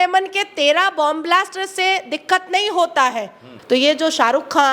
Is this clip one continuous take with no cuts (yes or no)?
no